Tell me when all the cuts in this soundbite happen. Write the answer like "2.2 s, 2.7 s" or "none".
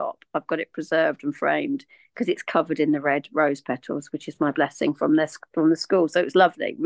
none